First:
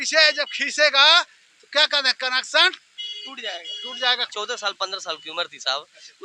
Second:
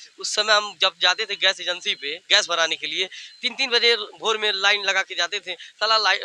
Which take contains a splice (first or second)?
first